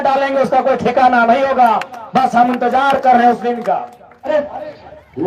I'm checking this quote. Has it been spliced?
yes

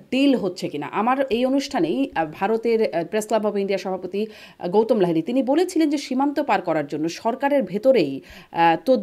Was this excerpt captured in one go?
yes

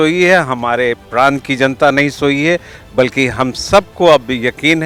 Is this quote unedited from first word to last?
yes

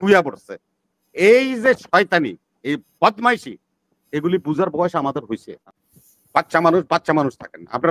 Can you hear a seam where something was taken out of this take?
yes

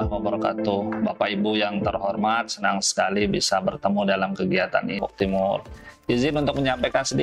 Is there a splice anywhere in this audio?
yes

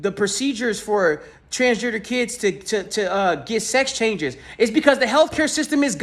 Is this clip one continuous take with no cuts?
yes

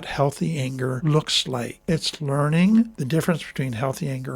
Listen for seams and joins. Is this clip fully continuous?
no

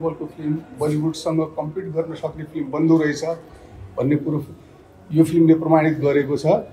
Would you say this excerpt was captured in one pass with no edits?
yes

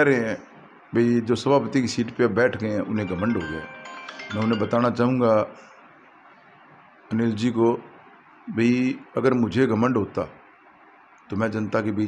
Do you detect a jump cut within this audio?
no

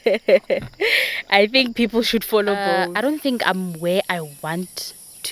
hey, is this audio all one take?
no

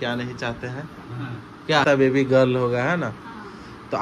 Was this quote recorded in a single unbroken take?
no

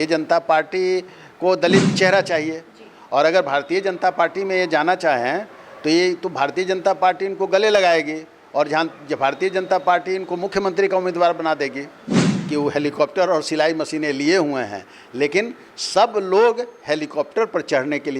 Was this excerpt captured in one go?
no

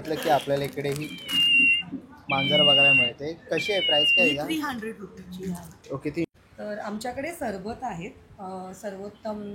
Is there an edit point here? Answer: yes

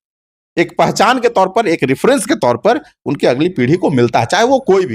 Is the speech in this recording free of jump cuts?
yes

